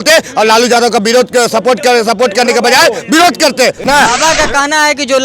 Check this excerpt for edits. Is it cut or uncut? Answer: cut